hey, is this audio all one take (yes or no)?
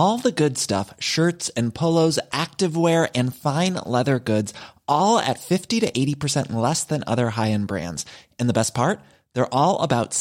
yes